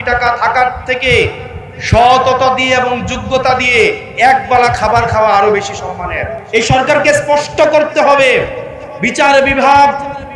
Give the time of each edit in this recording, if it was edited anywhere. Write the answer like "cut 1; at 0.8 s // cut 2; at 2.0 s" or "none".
cut 1; at 6.3 s